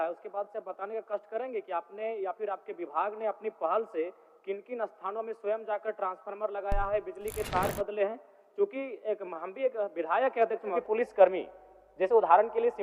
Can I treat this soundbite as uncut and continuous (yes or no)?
no